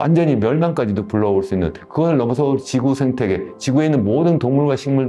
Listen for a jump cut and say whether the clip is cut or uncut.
uncut